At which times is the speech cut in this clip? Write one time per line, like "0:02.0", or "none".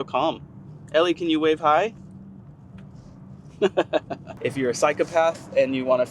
0:04.2